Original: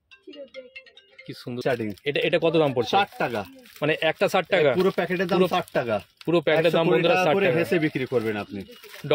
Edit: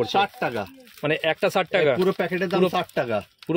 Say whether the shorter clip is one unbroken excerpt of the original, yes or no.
yes